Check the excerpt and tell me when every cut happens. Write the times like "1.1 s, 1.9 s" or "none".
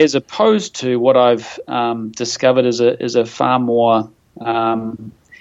none